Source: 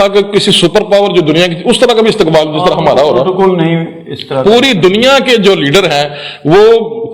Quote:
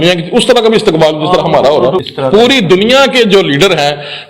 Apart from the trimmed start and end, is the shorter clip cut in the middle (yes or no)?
yes